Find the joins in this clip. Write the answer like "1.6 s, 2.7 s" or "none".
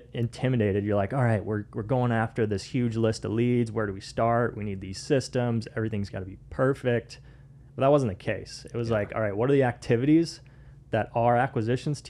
none